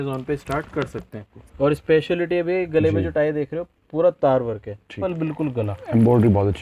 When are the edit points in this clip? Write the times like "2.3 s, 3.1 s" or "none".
1.3 s, 5.0 s